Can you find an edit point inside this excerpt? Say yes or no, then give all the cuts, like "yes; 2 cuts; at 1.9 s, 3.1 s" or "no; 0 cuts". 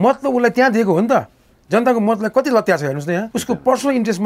yes; 1 cut; at 3.3 s